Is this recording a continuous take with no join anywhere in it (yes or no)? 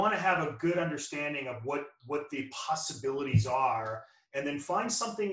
yes